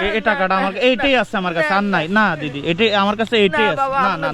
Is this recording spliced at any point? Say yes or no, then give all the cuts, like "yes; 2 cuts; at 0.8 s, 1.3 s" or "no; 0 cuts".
no; 0 cuts